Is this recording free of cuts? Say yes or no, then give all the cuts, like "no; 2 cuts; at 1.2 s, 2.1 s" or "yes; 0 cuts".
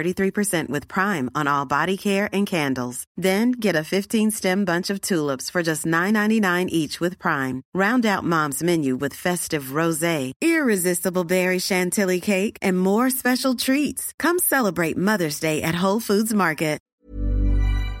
no; 1 cut; at 16.9 s